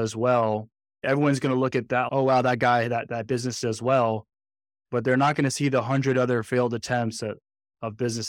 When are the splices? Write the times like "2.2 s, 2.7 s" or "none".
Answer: none